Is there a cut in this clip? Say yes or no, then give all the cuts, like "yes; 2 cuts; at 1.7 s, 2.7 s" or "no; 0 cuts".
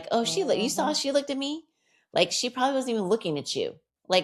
no; 0 cuts